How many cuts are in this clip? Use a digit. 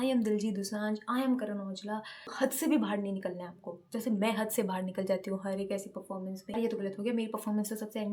2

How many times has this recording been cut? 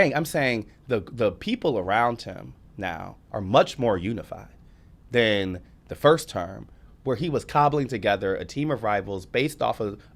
1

